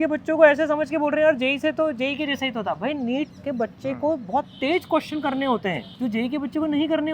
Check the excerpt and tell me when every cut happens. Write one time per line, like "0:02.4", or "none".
0:03.4
0:05.9